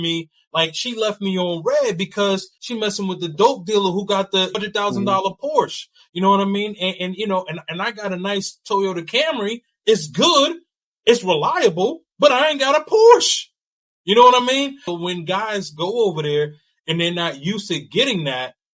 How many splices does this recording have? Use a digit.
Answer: 3